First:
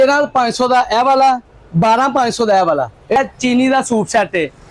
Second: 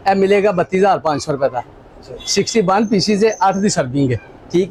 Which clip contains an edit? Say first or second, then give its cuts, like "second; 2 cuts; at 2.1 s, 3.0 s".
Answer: first; 1 cut; at 3.2 s